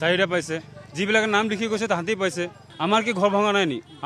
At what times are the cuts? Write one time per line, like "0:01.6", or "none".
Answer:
0:02.7